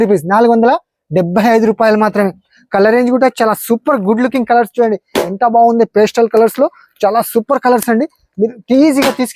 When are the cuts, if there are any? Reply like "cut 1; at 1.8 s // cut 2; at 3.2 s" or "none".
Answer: none